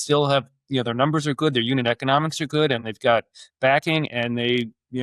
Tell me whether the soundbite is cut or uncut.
uncut